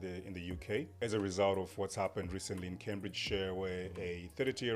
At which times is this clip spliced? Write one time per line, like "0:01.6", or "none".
0:00.9